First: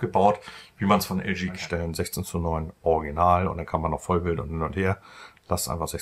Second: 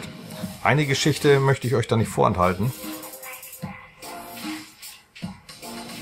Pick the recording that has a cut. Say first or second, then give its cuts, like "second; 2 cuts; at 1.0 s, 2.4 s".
first; 1 cut; at 1.6 s